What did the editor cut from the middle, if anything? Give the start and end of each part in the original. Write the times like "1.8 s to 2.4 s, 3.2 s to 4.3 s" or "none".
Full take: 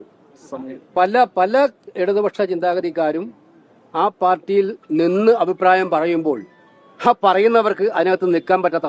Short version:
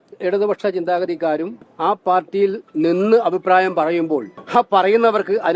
3.4 s to 3.8 s, 6.5 s to 6.9 s